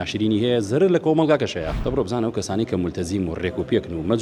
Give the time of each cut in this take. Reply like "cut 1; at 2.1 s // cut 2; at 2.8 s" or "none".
cut 1; at 1.7 s